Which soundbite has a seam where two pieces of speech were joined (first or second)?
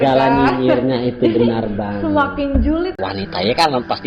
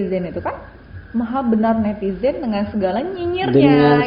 first